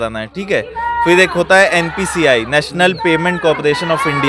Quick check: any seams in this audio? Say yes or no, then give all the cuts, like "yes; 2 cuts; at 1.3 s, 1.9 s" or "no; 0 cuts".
no; 0 cuts